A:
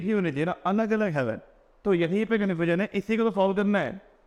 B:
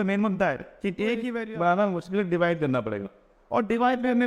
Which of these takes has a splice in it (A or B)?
B